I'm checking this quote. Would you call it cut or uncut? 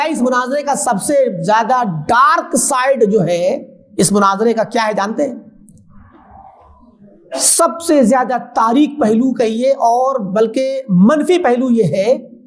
uncut